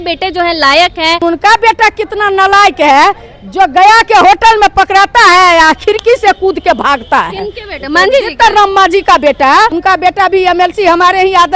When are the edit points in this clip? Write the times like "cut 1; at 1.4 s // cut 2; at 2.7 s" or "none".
cut 1; at 1.2 s // cut 2; at 9.8 s